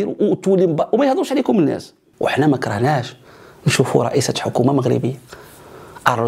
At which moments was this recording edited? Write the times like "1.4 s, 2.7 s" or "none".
2.1 s